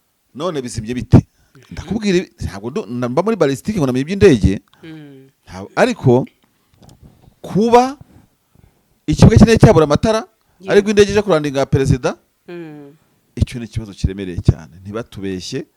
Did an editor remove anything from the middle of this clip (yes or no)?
no